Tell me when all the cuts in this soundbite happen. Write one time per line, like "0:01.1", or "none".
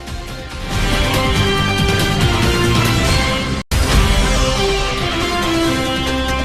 none